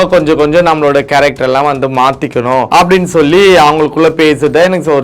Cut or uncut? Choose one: cut